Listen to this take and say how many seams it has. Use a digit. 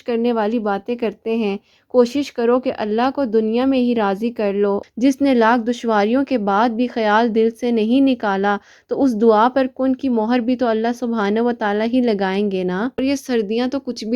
2